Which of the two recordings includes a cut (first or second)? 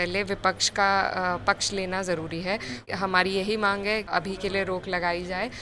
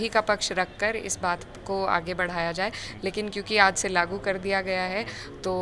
first